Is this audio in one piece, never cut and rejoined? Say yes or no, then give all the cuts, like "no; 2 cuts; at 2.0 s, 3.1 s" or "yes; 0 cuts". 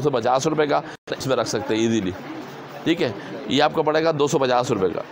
no; 1 cut; at 1.2 s